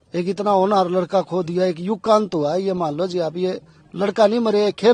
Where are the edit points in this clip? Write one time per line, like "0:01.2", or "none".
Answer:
none